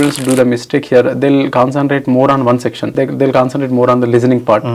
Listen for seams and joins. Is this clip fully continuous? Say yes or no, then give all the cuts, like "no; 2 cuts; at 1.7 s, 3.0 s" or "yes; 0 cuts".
no; 1 cut; at 2.8 s